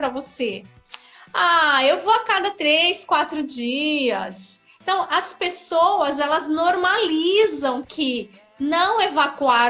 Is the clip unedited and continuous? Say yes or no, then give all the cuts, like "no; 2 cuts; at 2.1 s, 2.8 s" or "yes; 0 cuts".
yes; 0 cuts